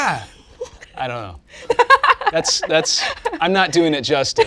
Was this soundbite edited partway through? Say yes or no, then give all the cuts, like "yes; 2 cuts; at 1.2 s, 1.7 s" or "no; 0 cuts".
no; 0 cuts